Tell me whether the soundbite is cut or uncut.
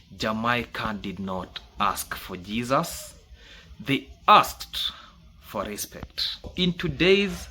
cut